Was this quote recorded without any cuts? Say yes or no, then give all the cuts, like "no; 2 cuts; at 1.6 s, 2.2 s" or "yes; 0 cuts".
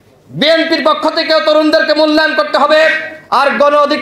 yes; 0 cuts